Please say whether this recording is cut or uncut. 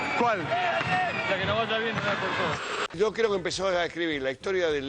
cut